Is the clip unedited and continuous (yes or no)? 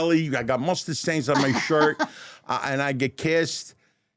yes